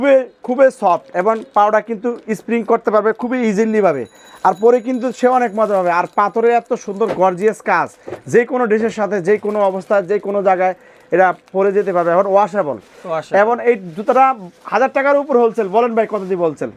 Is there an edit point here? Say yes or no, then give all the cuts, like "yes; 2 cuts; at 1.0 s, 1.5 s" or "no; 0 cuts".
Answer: no; 0 cuts